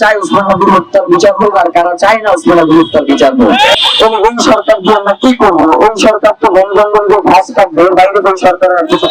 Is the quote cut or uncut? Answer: cut